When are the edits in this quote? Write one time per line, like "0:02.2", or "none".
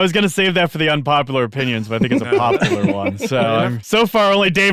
0:03.8